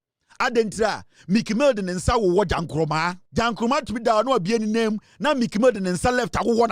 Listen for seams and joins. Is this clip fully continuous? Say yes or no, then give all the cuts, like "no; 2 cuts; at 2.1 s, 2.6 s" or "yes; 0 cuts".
no; 1 cut; at 3.2 s